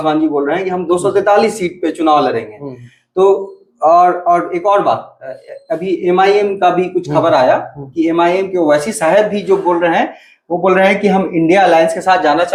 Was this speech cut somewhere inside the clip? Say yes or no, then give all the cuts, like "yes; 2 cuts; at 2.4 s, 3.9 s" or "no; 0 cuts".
no; 0 cuts